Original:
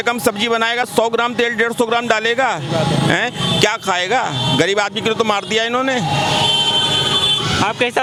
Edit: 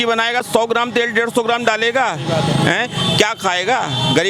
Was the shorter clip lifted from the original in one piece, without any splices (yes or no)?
yes